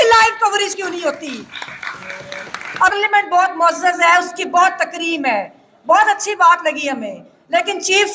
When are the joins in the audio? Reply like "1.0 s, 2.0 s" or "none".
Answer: 2.9 s